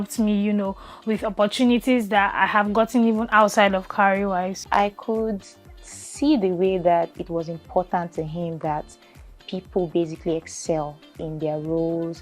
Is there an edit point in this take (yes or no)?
yes